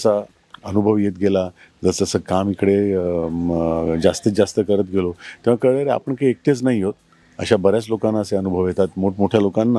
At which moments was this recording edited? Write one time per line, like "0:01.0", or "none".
none